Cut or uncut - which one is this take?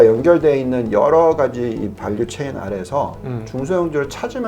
uncut